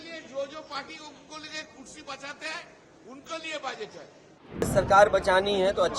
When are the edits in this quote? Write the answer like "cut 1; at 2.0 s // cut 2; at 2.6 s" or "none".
cut 1; at 4.7 s